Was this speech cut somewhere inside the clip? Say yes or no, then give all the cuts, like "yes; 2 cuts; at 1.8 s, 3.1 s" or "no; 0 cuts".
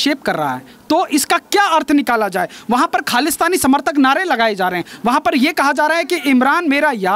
no; 0 cuts